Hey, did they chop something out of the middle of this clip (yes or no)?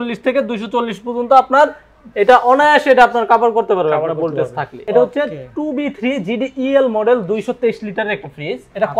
no